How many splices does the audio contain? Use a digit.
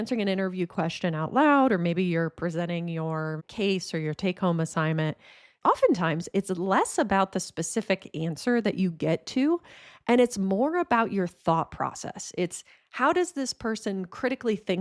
0